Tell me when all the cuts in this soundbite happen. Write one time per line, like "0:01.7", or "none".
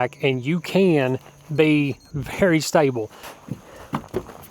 0:03.2